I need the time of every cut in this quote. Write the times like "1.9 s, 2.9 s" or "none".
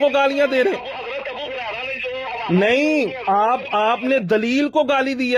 none